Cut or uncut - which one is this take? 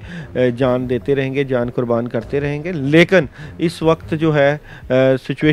uncut